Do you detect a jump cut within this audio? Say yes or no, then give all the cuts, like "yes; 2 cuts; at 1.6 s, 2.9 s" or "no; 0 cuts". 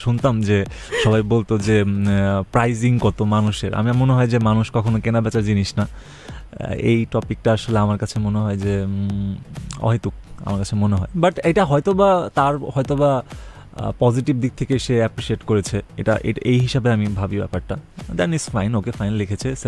no; 0 cuts